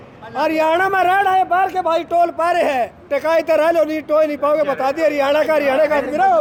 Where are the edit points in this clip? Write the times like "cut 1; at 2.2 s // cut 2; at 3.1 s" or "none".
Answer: none